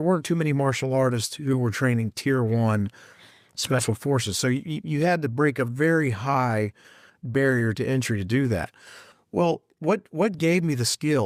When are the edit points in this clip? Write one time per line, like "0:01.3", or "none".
none